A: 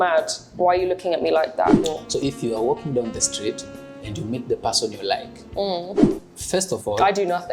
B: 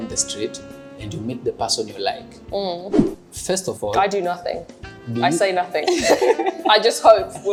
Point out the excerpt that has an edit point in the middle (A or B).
A